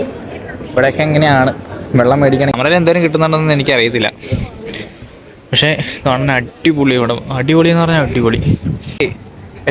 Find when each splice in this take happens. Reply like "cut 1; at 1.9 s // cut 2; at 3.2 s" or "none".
cut 1; at 2.5 s // cut 2; at 9.0 s